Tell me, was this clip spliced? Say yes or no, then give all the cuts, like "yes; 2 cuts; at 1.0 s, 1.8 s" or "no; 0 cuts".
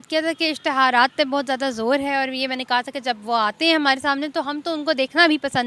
no; 0 cuts